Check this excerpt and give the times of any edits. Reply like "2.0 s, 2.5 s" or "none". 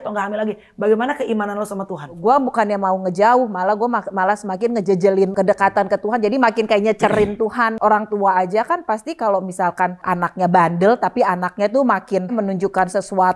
2.2 s, 5.3 s, 7.8 s, 10.0 s, 12.3 s